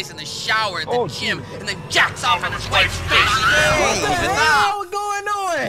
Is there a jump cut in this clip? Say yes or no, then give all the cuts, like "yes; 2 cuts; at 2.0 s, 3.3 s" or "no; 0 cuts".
no; 0 cuts